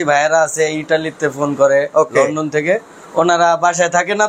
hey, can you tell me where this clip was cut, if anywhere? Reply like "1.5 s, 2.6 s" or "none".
none